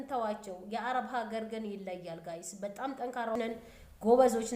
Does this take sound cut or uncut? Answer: cut